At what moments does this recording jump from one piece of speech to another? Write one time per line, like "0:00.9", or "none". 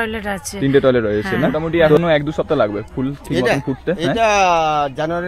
0:01.6